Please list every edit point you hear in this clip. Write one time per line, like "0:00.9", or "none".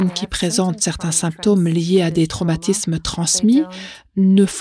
none

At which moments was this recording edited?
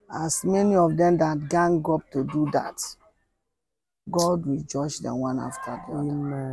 none

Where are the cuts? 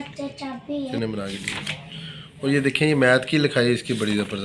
0:00.9

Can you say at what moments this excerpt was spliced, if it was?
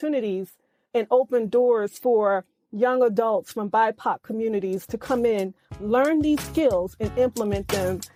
none

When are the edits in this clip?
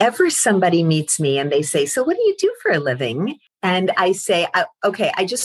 0:03.5

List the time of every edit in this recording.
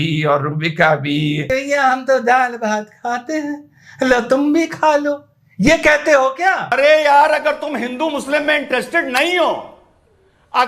0:01.4
0:06.7

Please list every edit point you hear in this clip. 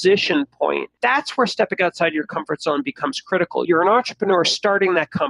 0:00.9

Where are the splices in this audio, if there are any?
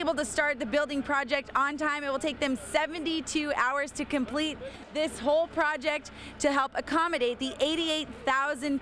none

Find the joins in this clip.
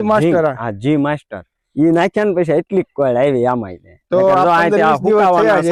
none

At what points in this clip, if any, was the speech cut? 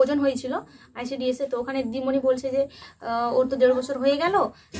none

